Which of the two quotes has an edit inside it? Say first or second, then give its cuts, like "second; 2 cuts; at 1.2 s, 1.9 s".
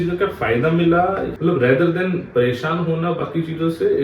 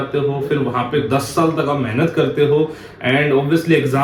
first; 1 cut; at 1.3 s